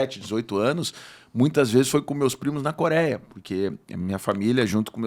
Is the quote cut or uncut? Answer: uncut